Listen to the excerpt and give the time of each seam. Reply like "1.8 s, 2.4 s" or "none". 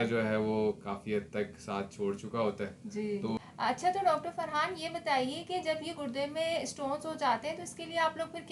3.4 s